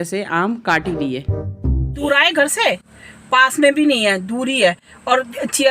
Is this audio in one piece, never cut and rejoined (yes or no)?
no